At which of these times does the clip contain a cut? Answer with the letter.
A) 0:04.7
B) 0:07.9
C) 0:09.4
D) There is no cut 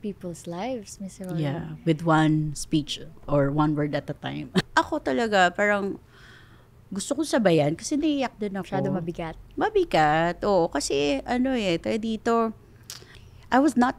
A